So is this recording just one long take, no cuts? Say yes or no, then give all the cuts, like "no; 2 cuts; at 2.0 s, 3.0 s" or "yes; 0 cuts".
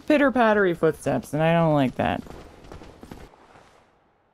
no; 1 cut; at 3.3 s